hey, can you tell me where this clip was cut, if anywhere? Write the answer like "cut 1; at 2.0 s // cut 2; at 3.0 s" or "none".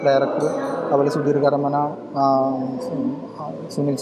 none